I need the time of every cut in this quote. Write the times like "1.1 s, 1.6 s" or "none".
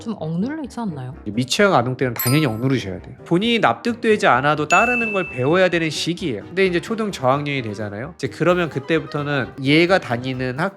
1.2 s, 3.2 s